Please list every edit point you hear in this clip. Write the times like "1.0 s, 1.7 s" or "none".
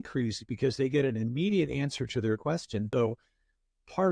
2.9 s